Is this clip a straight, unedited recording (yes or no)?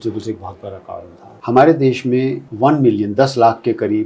no